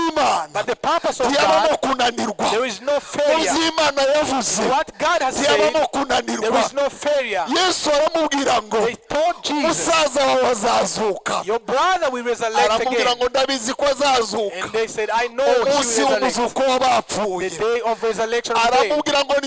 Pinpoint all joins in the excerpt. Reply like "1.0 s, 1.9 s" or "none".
none